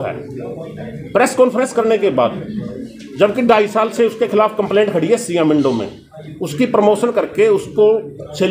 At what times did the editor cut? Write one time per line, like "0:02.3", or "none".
none